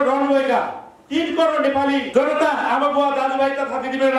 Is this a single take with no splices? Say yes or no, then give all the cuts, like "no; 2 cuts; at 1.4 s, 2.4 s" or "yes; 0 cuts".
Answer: no; 1 cut; at 2.1 s